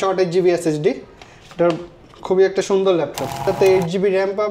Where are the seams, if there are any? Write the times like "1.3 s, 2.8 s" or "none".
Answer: 3.4 s